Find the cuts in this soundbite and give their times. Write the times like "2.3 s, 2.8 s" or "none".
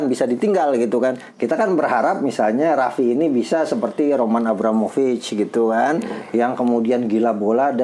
none